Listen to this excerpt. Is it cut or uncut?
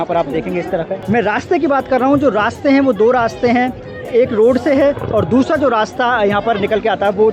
cut